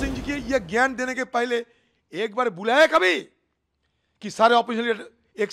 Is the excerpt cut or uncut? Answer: uncut